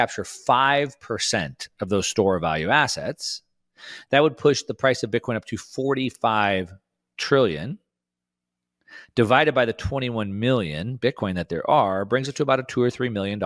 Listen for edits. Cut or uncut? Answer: uncut